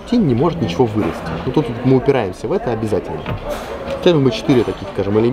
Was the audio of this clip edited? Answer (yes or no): no